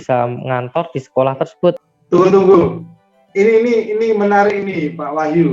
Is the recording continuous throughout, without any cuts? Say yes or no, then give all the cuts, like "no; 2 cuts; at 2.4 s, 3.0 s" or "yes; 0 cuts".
no; 2 cuts; at 1.9 s, 3.2 s